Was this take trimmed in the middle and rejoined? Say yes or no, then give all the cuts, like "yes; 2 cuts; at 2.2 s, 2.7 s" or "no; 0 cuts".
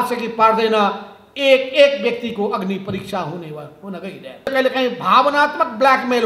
yes; 1 cut; at 4.5 s